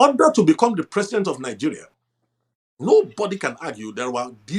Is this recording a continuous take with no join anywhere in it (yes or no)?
yes